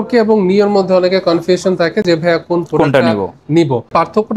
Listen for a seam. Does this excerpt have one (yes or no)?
no